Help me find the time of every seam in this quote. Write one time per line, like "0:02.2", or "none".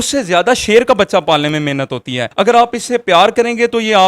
0:02.2